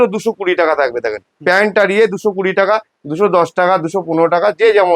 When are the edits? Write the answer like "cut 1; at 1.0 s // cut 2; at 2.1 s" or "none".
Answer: none